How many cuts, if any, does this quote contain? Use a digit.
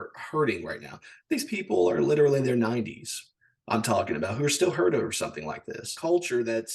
1